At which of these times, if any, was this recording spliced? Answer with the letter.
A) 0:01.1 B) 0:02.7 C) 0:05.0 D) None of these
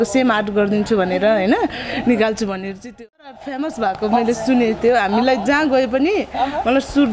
B